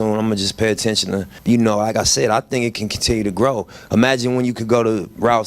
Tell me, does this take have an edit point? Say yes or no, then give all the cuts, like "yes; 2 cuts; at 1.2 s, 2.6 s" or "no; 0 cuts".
yes; 1 cut; at 1.3 s